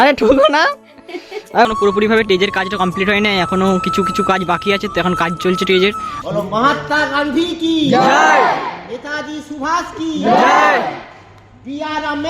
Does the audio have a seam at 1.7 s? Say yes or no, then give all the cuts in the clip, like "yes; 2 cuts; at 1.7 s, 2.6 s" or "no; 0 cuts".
yes; 2 cuts; at 1.7 s, 6.1 s